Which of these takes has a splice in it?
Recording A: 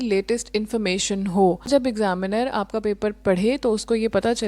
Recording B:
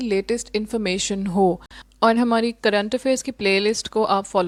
A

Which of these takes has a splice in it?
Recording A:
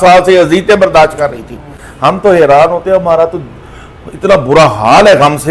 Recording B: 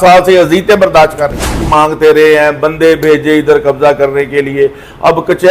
B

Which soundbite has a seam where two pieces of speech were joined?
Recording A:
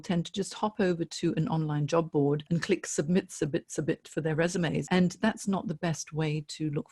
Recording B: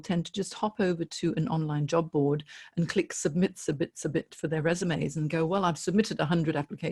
A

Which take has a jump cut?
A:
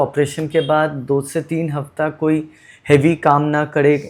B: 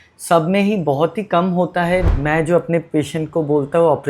B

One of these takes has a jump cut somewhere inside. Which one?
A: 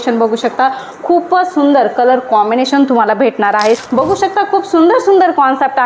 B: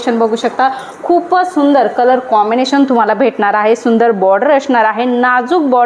A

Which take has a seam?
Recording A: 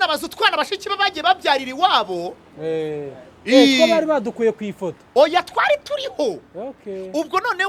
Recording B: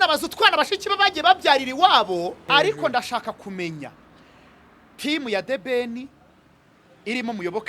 B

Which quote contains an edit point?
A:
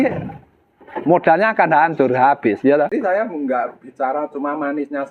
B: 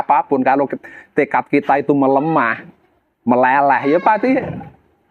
A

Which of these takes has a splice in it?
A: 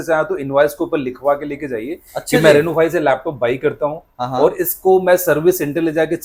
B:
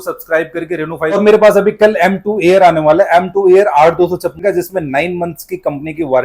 B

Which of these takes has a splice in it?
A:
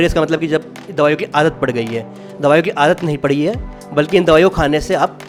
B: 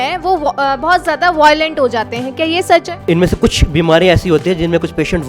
B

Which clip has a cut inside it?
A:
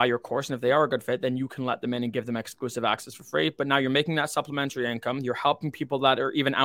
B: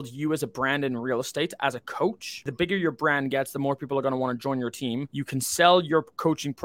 B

